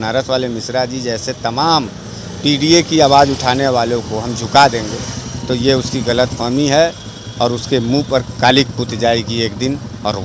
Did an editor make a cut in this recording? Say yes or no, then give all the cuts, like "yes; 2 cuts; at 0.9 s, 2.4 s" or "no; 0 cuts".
no; 0 cuts